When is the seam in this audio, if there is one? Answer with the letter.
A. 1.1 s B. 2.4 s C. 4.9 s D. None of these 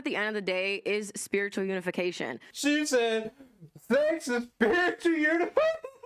B